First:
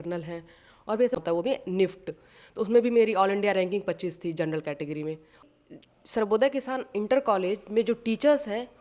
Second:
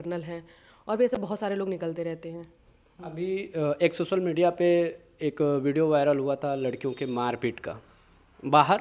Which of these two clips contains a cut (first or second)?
first